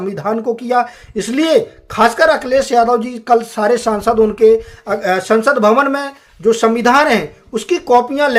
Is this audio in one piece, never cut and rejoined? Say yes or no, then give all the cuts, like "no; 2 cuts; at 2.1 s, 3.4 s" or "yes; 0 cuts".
yes; 0 cuts